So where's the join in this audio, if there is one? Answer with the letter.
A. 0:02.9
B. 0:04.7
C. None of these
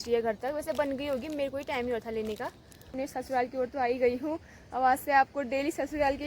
A